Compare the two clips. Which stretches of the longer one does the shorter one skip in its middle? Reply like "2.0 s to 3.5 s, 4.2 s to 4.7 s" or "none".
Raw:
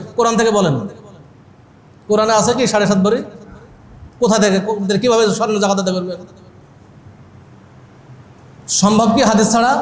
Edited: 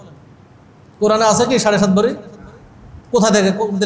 none